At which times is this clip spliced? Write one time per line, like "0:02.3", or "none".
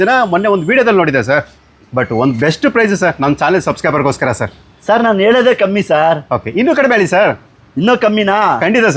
none